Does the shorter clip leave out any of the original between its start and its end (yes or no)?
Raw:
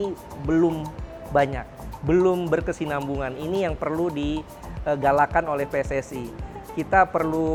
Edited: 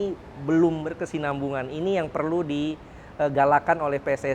yes